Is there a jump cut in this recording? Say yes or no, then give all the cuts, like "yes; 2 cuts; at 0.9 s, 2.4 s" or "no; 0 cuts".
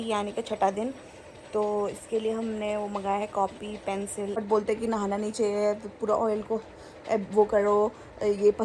yes; 1 cut; at 4.4 s